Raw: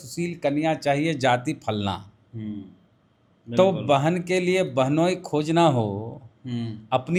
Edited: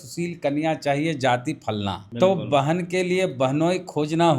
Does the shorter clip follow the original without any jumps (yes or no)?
no